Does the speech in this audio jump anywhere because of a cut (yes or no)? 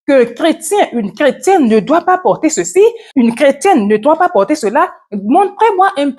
yes